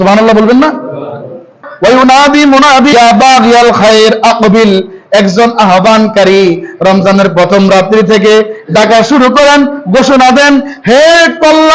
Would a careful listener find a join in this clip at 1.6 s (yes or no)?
yes